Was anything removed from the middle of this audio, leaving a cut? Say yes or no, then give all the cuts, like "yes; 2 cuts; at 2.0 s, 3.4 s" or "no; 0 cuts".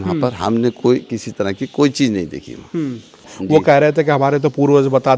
yes; 1 cut; at 3.3 s